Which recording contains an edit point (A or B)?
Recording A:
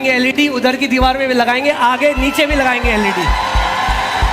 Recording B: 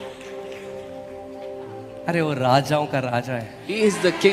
A